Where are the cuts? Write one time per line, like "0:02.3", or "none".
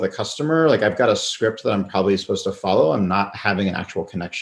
none

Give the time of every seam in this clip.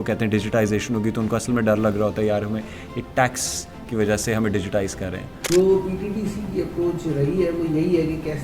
0:05.3

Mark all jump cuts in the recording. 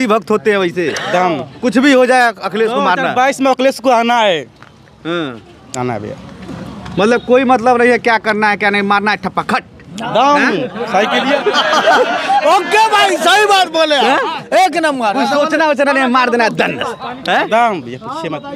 none

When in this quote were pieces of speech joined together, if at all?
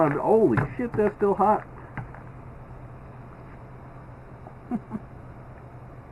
none

